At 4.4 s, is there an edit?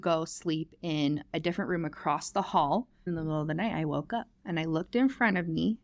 yes; 2 cuts; at 3.0 s, 4.4 s

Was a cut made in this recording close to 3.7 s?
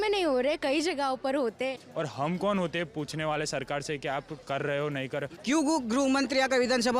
no; 2 cuts; at 1.8 s, 5.3 s

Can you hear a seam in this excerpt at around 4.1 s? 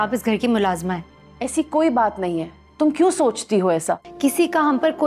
yes; 1 cut; at 4.1 s

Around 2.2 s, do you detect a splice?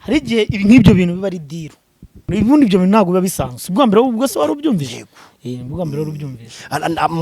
yes; 1 cut; at 2.2 s

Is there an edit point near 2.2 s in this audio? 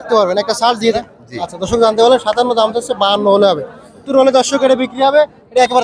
no; 2 cuts; at 1.0 s, 4.0 s

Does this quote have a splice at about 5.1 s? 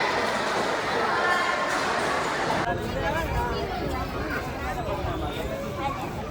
no; 1 cut; at 2.7 s

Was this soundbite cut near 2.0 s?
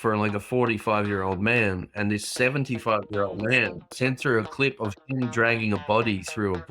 no; 1 cut; at 3.9 s

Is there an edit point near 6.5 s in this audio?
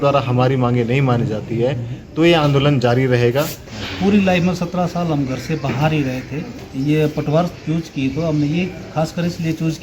yes; 2 cuts; at 3.7 s, 6.5 s

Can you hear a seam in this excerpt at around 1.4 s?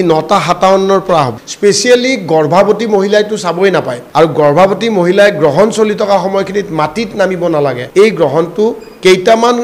yes; 3 cuts; at 1.4 s, 4.0 s, 7.8 s

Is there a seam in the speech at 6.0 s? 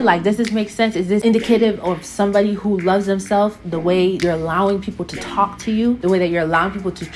yes; 3 cuts; at 1.2 s, 4.2 s, 6.0 s

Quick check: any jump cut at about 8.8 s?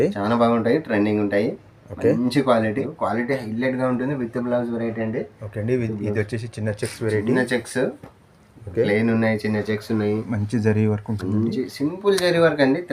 no; 1 cut; at 2.9 s

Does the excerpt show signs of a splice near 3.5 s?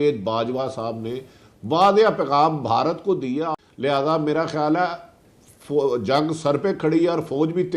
yes; 1 cut; at 3.5 s

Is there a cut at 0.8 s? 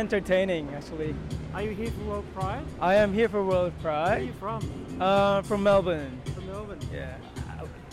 no; 0 cuts

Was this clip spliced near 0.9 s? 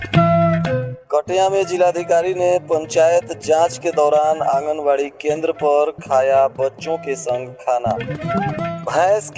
yes; 1 cut; at 0.9 s

